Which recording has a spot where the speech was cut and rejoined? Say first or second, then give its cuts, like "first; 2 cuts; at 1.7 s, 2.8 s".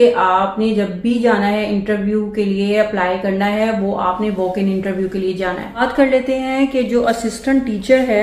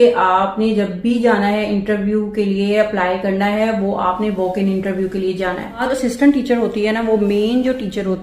second; 1 cut; at 5.9 s